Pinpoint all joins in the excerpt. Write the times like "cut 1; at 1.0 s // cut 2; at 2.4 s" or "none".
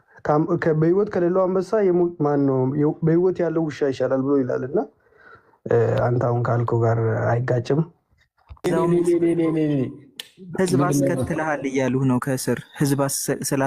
cut 1; at 8.7 s